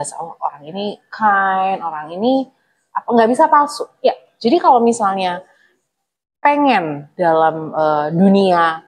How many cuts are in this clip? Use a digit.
0